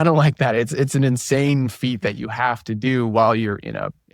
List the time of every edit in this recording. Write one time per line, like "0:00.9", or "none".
none